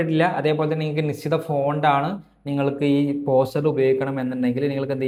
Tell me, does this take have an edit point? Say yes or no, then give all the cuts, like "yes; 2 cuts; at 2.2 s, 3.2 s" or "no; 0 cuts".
no; 0 cuts